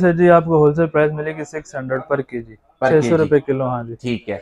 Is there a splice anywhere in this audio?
no; 0 cuts

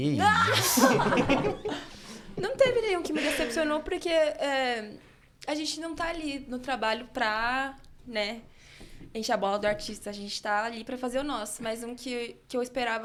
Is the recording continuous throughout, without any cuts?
yes; 0 cuts

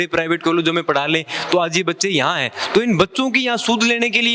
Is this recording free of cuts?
yes; 0 cuts

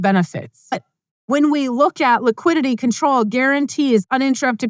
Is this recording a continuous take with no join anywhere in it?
no; 1 cut; at 0.9 s

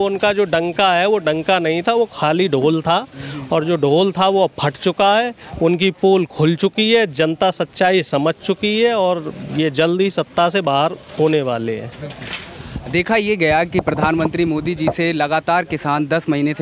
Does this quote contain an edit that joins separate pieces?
no; 0 cuts

